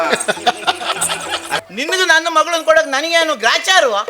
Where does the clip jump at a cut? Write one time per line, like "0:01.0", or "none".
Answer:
0:01.6